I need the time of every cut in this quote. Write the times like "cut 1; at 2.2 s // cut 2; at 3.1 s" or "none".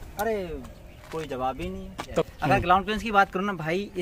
cut 1; at 2.3 s